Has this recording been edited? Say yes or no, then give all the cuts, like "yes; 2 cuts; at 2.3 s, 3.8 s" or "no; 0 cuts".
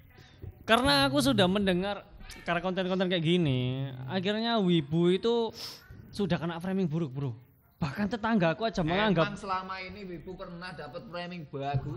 no; 0 cuts